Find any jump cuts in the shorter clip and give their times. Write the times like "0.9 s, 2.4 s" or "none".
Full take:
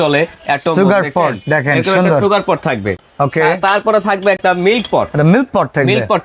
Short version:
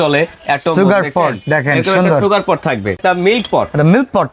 3.0 s